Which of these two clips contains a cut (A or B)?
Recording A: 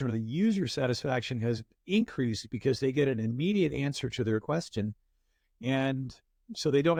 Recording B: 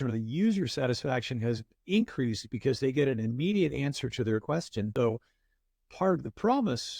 B